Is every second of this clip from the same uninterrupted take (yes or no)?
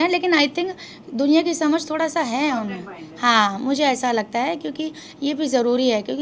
yes